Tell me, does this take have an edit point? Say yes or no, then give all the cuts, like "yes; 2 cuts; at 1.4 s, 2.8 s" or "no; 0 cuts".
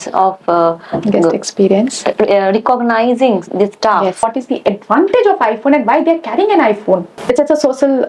yes; 2 cuts; at 4.3 s, 7.1 s